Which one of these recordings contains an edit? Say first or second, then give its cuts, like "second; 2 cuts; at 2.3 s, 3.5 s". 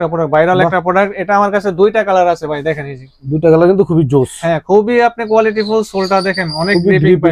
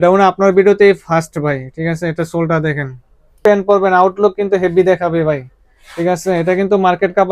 second; 1 cut; at 3.4 s